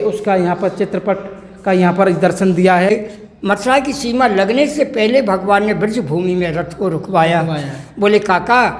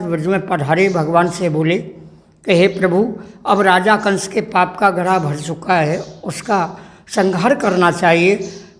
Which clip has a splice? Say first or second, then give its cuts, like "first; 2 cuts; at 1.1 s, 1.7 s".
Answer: first; 1 cut; at 2.9 s